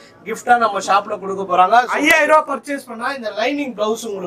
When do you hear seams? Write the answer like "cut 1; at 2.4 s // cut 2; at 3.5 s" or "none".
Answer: cut 1; at 1.9 s